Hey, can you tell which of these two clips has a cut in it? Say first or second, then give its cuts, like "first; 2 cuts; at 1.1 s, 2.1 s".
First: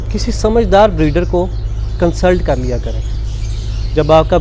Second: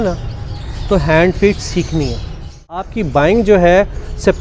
second; 1 cut; at 2.9 s